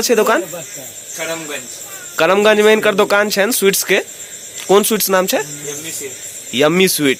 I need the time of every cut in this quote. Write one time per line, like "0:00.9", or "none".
none